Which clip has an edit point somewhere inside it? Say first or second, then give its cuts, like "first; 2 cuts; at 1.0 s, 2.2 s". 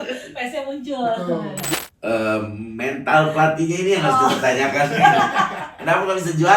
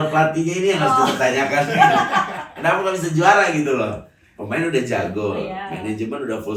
first; 1 cut; at 1.7 s